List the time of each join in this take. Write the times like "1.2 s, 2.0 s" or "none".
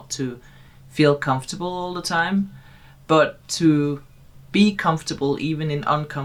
none